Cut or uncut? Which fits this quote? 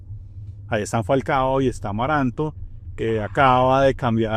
uncut